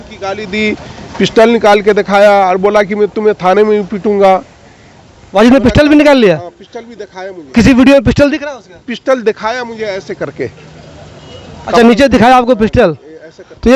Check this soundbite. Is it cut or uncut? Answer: uncut